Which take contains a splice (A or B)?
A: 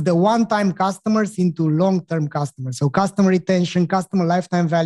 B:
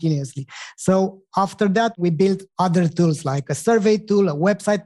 B